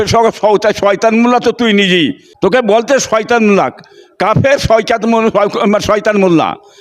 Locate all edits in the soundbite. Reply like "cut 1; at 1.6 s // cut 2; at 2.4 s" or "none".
cut 1; at 2.2 s